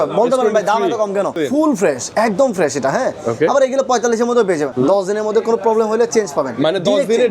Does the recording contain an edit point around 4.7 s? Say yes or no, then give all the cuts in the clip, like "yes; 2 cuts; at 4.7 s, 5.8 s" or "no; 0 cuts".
yes; 2 cuts; at 1.4 s, 4.7 s